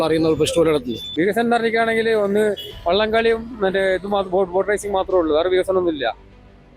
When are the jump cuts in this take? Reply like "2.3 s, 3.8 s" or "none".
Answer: 1.0 s